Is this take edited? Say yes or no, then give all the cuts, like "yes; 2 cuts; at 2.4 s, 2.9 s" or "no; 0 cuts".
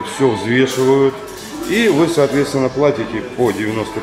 no; 0 cuts